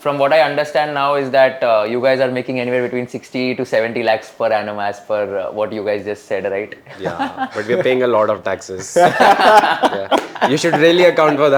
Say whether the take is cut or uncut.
uncut